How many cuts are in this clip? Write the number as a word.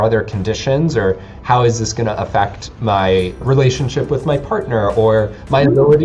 one